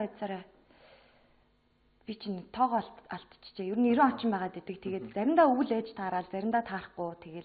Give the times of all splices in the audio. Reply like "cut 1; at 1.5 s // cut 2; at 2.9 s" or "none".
none